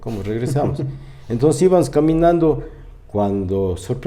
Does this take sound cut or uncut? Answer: uncut